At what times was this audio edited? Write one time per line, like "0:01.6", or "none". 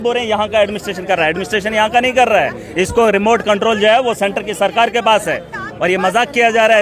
none